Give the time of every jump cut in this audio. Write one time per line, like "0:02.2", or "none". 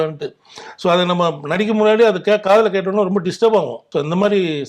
0:03.8